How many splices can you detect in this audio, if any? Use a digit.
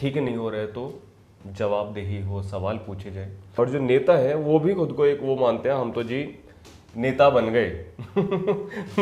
1